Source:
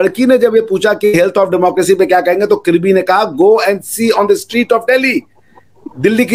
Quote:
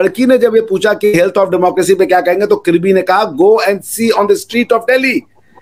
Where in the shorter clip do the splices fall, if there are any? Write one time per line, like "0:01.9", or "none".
none